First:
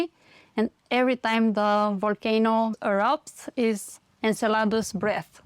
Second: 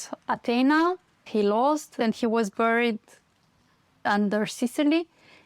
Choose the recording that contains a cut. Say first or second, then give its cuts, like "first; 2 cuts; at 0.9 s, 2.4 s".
second; 3 cuts; at 1.1 s, 2.0 s, 4.1 s